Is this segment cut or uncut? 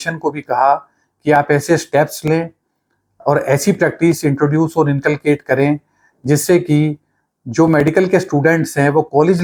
uncut